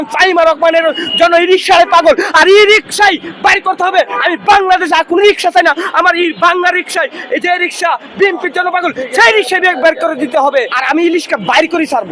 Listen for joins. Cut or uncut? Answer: cut